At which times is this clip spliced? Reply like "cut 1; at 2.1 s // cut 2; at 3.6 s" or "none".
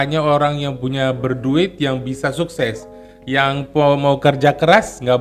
none